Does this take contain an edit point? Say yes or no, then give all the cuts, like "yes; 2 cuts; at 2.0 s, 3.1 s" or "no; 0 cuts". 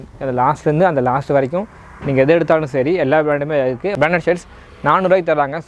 yes; 1 cut; at 3.9 s